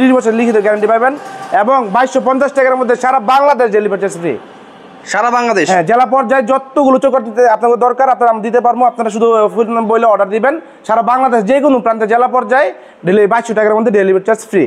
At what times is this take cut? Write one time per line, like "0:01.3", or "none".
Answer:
none